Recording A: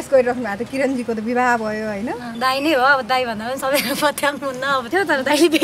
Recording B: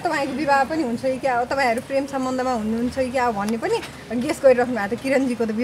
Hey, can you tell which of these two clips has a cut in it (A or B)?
A